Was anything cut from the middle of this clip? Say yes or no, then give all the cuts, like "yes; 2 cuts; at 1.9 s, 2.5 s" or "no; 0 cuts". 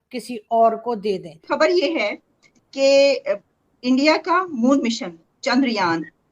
yes; 1 cut; at 1.3 s